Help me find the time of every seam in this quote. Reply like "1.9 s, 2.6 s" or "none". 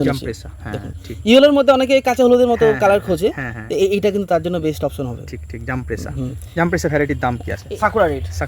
7.5 s